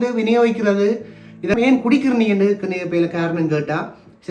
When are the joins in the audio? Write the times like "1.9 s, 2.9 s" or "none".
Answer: 1.6 s